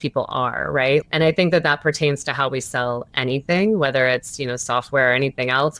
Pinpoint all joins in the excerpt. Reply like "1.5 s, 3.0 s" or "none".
1.0 s